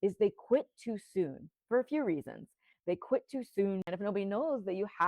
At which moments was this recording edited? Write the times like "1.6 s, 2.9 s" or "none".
3.8 s